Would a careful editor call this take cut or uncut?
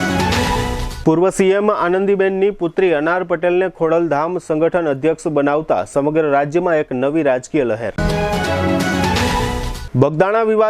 cut